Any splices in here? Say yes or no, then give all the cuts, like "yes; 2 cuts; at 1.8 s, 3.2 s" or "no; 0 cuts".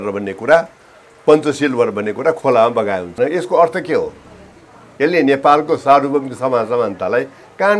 yes; 1 cut; at 3.1 s